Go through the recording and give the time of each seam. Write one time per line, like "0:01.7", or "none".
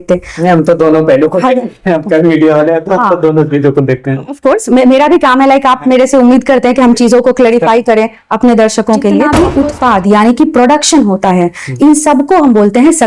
0:09.3